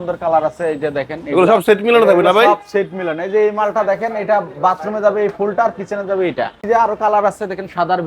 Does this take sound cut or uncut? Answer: cut